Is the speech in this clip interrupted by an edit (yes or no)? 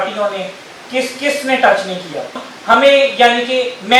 yes